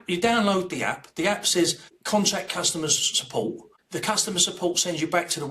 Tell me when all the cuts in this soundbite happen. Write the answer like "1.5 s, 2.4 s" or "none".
1.9 s, 3.7 s